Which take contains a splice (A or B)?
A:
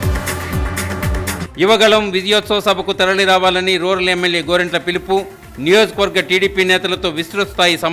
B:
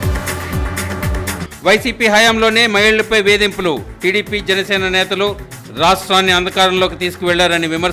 A